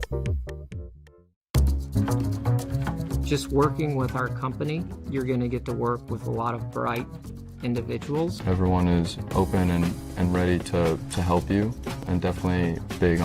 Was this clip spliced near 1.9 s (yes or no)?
yes